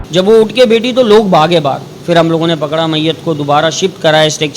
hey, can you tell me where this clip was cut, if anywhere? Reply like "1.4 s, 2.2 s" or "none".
1.9 s